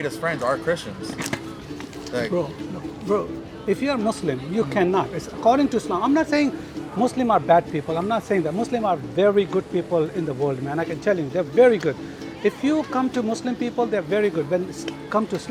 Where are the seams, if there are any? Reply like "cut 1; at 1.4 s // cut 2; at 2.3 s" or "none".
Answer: none